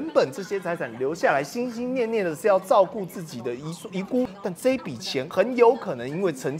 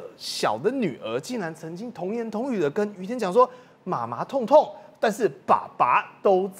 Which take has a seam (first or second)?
first